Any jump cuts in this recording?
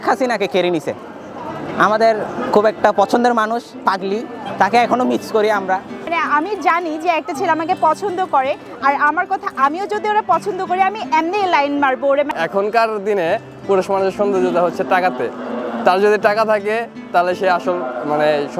yes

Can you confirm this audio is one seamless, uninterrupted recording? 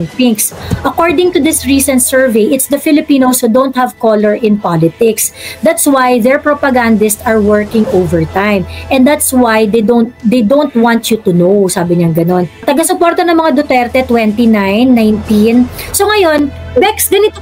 no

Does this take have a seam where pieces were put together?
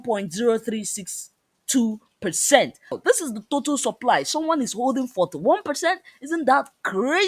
yes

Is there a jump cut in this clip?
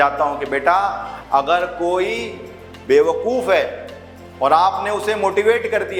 no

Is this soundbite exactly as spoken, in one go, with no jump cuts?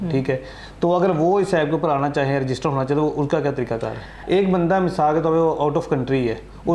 no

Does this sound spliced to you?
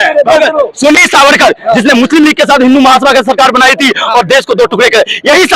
yes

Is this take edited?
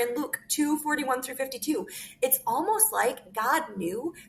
no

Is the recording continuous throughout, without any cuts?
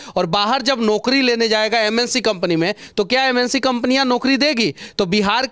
yes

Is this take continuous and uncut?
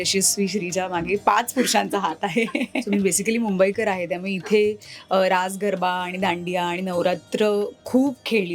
no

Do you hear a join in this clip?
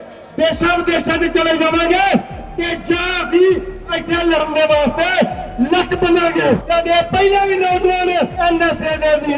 yes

